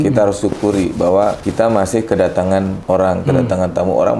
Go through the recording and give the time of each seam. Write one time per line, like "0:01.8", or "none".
0:01.4
0:02.8